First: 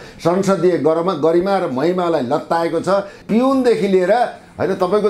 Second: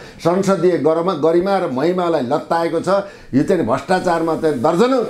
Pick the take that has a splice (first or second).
first